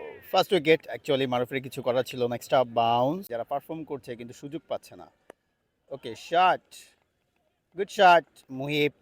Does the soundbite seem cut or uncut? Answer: cut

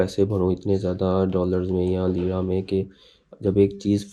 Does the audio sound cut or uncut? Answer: uncut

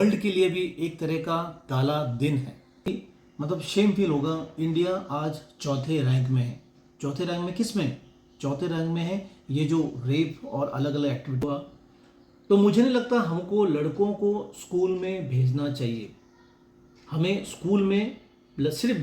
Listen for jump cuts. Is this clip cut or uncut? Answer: cut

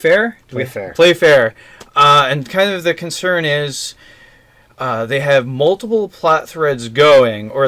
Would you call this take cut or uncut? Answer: cut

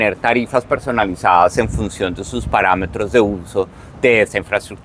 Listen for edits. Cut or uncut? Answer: uncut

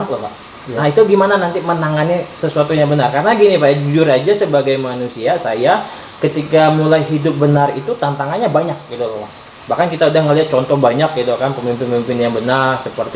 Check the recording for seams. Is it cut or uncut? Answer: uncut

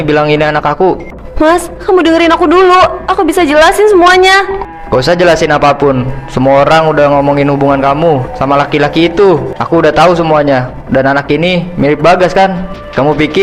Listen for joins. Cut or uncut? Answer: uncut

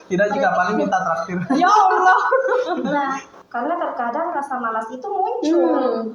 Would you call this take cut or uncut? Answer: cut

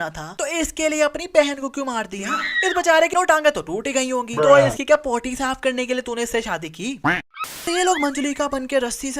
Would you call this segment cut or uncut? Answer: cut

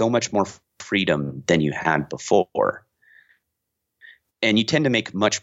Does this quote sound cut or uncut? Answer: uncut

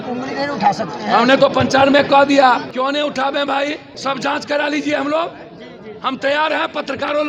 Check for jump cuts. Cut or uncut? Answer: cut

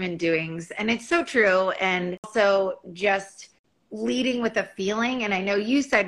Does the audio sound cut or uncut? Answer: cut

